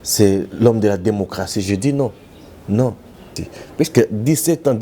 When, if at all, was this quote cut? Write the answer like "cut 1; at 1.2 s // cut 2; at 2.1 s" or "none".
cut 1; at 3.2 s